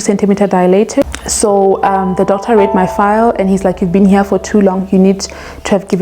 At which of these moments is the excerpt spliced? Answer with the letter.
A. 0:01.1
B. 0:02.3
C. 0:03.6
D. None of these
A